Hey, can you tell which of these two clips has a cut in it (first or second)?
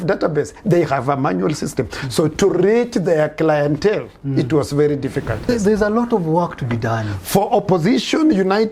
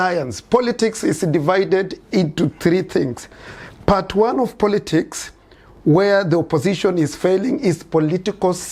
first